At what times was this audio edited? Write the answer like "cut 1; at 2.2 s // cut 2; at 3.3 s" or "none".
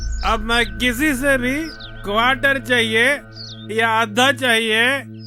none